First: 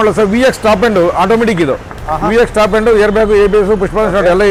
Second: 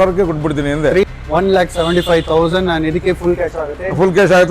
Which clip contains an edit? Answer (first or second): second